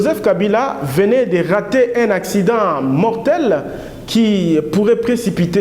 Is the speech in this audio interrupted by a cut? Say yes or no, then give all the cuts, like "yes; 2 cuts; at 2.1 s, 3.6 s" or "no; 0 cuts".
no; 0 cuts